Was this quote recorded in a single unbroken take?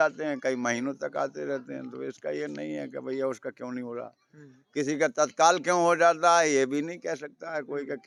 yes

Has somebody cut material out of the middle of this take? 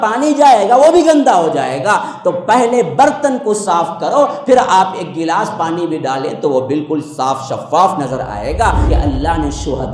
yes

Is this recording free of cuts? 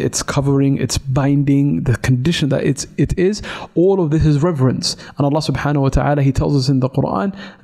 yes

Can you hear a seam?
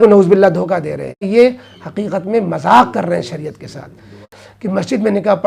yes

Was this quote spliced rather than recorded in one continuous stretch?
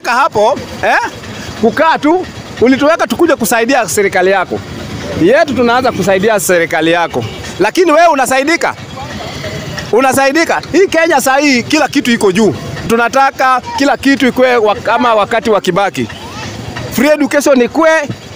yes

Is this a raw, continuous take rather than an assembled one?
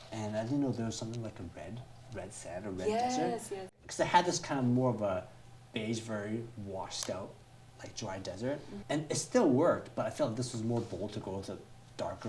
no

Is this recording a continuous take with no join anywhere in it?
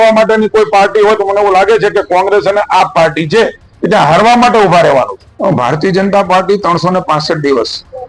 no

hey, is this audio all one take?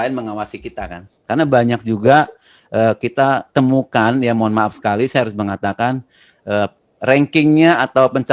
no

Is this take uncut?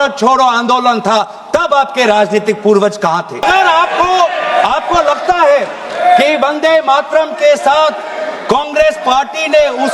no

